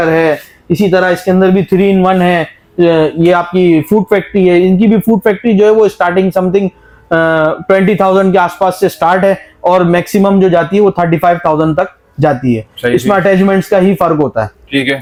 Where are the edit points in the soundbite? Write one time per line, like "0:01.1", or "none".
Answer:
none